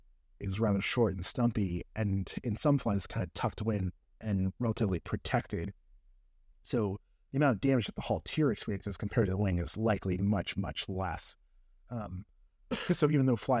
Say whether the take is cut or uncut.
uncut